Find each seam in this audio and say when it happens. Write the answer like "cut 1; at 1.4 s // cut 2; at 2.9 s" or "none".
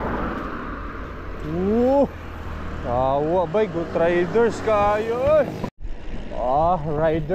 cut 1; at 5.7 s